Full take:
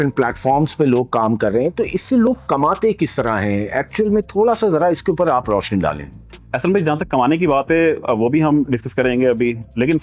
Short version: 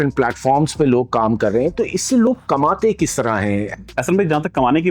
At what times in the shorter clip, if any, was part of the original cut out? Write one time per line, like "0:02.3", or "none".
0:03.8